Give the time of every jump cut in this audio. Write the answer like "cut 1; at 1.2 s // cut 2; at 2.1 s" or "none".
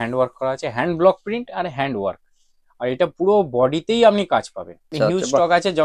cut 1; at 4.9 s